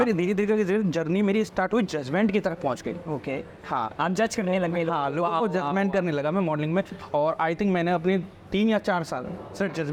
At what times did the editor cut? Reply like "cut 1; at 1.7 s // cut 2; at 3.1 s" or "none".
none